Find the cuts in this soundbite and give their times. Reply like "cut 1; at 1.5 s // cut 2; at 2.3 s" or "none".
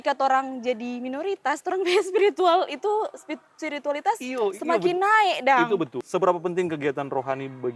cut 1; at 6.0 s